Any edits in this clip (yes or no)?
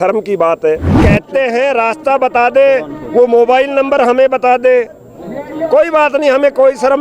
yes